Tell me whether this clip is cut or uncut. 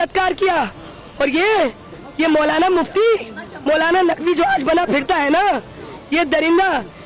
uncut